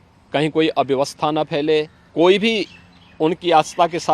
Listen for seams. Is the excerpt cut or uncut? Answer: cut